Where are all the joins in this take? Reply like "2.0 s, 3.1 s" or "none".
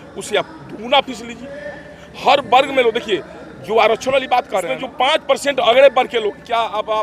4.8 s

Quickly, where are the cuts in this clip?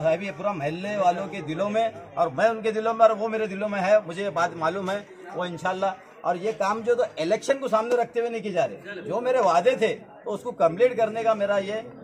none

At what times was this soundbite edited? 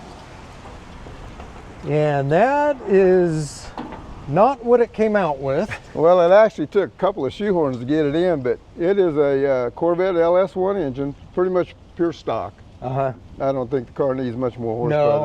5.8 s, 13.2 s

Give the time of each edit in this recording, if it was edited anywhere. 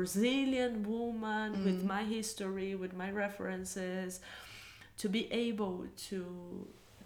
none

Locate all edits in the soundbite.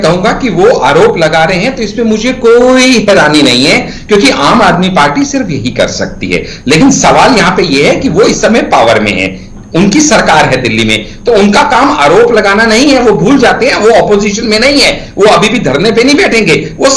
none

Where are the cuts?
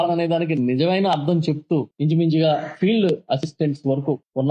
1.9 s

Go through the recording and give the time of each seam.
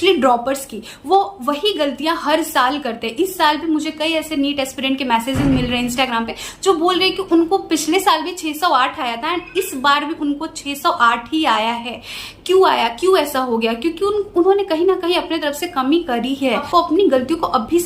none

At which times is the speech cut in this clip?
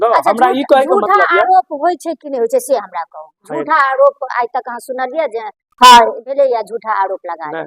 none

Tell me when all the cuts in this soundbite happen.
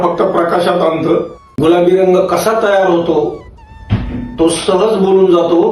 1.4 s

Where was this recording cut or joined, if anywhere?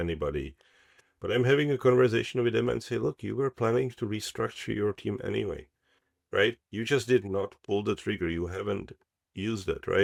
none

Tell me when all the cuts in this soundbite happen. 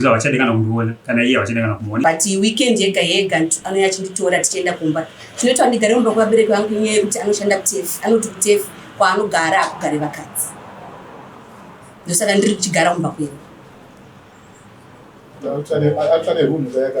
2.0 s

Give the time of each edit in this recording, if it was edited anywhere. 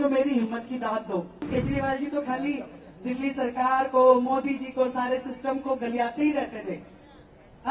1.5 s

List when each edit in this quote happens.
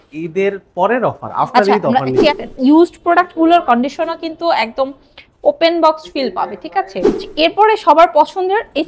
2.4 s, 7.2 s

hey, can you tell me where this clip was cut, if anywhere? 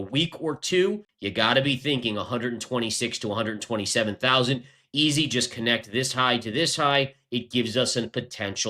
1.1 s

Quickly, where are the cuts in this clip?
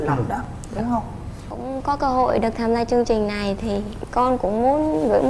1.4 s

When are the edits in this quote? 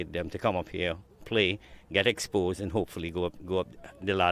none

